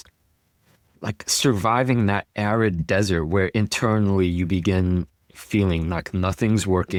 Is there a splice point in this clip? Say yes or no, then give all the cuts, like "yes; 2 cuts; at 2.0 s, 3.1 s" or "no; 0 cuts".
no; 0 cuts